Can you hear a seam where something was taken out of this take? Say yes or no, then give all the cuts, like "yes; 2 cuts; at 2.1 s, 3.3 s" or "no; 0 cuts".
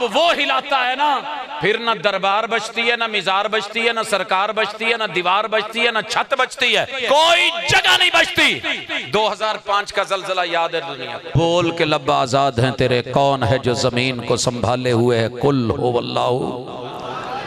yes; 2 cuts; at 6.9 s, 11.3 s